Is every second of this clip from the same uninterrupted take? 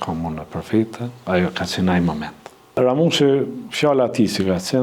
no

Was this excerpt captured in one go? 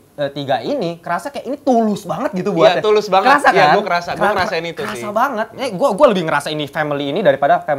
yes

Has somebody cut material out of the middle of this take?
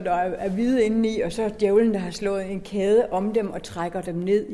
no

